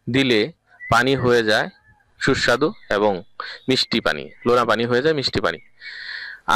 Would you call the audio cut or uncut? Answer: uncut